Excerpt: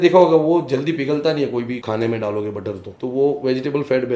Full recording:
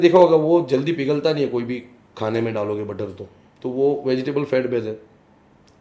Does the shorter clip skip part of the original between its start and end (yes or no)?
yes